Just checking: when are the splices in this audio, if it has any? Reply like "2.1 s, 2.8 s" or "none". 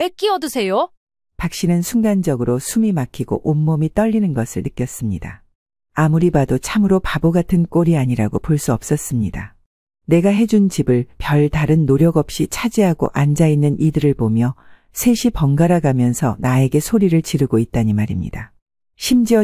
none